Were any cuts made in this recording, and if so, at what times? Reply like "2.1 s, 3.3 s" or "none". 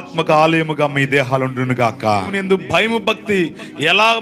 2.4 s